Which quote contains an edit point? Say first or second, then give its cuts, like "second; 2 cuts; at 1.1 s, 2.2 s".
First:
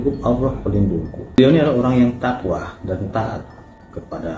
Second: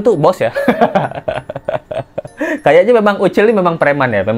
first; 1 cut; at 1.4 s